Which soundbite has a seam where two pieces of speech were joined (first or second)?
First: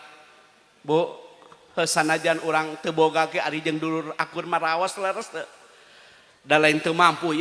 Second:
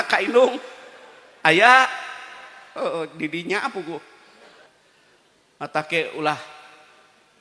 second